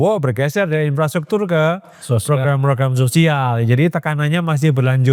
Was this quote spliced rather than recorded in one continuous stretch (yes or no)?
no